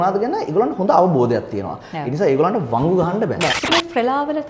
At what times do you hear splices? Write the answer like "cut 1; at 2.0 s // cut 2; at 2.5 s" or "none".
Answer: cut 1; at 3.6 s